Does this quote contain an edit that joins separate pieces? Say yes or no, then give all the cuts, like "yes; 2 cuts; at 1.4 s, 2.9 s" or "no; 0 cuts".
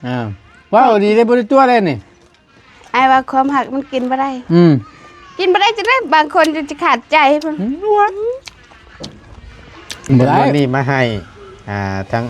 yes; 1 cut; at 10.5 s